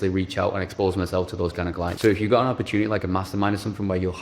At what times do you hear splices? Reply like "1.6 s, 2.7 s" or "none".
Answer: 1.9 s